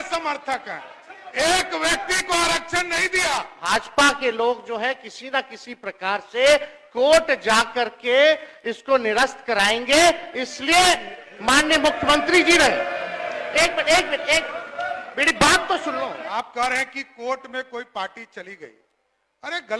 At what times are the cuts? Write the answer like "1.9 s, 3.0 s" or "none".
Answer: 3.5 s, 16.3 s